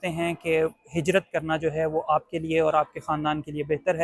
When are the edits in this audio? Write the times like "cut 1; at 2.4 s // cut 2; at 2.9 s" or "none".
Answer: none

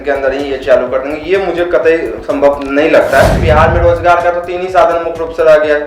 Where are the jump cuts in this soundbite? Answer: cut 1; at 3.4 s

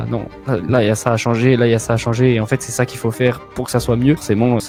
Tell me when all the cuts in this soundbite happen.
none

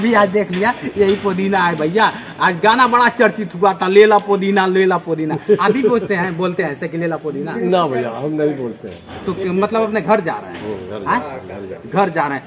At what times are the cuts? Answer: none

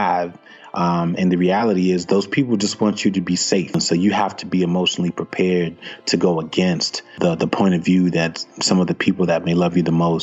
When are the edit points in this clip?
cut 1; at 3.8 s // cut 2; at 7.1 s

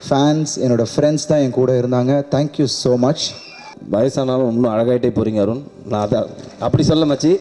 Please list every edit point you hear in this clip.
cut 1; at 3.7 s

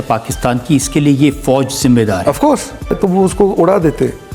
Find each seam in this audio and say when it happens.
cut 1; at 2.9 s

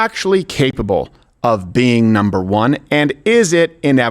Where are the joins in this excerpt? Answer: none

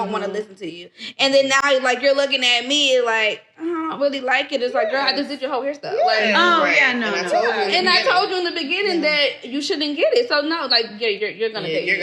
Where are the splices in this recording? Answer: none

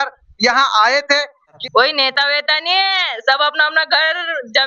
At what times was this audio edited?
cut 1; at 1.6 s

